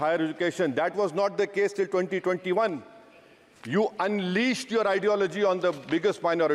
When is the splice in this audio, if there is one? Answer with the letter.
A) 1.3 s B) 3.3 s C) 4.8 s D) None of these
D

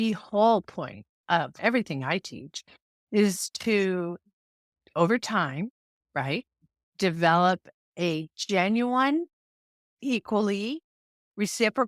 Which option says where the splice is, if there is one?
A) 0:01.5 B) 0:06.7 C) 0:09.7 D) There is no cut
A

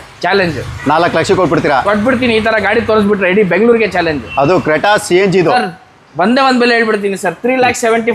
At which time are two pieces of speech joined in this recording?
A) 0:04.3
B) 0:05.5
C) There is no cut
B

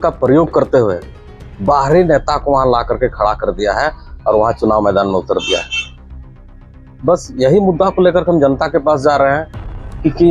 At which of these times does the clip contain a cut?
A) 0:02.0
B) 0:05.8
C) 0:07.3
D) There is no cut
D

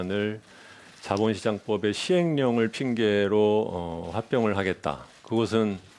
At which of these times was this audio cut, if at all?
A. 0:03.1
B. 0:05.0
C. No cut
A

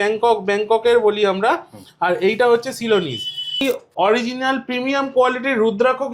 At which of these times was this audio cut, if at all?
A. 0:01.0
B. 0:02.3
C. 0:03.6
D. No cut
C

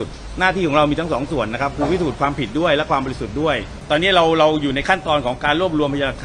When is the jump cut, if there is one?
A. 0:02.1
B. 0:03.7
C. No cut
B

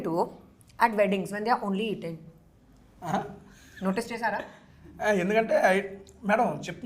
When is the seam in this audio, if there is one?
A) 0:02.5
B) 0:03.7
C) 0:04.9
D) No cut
D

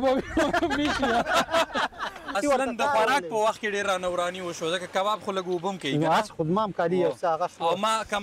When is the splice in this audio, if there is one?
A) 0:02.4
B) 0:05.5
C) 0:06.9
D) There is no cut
A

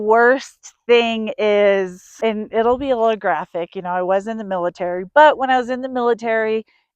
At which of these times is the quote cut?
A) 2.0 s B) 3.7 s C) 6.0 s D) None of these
A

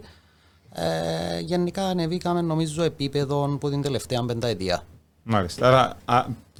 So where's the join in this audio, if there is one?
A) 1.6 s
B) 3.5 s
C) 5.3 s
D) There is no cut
D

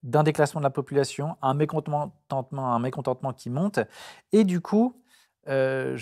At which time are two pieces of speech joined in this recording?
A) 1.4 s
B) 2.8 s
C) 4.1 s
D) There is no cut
D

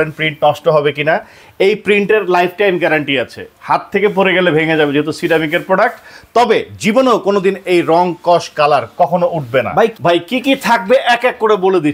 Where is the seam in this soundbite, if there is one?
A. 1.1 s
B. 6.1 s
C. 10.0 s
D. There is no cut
C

